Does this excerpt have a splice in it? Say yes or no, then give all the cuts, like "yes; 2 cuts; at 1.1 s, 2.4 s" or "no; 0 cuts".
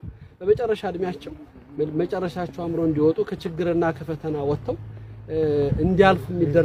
no; 0 cuts